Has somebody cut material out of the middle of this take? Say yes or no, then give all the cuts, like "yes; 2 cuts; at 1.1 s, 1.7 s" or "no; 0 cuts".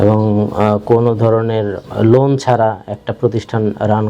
yes; 1 cut; at 1.8 s